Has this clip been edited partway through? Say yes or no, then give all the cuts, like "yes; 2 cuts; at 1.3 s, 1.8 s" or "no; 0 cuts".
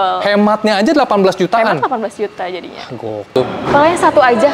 yes; 1 cut; at 3.3 s